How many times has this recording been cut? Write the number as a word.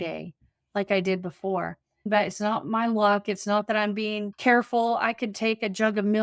two